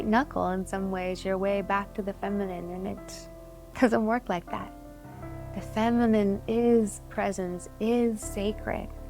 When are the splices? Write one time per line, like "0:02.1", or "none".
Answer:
0:07.6